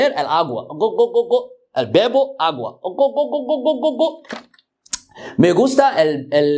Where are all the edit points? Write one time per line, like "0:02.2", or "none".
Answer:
none